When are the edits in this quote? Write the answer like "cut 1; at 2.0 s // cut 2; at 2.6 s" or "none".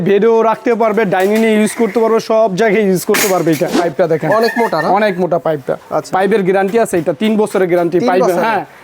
cut 1; at 3.8 s